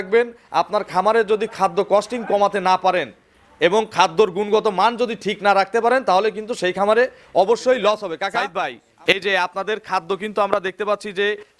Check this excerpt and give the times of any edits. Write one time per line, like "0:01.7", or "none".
0:08.4